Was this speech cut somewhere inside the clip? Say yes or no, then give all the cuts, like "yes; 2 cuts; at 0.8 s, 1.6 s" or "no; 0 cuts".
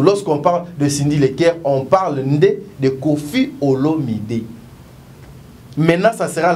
no; 0 cuts